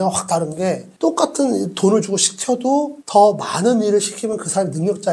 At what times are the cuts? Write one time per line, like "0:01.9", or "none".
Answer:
none